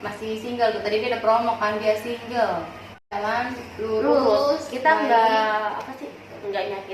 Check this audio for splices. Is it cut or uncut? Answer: cut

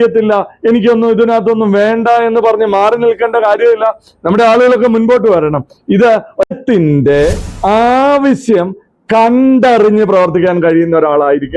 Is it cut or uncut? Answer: cut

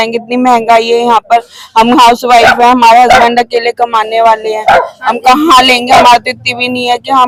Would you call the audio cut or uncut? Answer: uncut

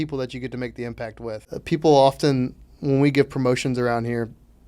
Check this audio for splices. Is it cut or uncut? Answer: cut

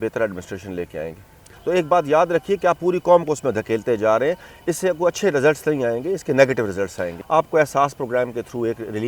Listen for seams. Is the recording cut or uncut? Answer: cut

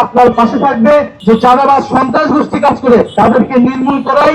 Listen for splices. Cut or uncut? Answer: cut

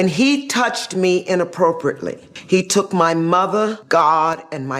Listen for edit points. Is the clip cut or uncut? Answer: cut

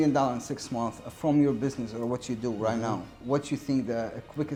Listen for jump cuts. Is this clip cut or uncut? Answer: uncut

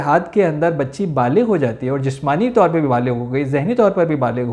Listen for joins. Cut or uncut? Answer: uncut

